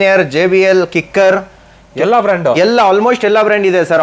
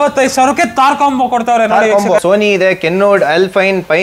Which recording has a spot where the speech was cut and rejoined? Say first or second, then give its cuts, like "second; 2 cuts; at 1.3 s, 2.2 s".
second; 1 cut; at 2.2 s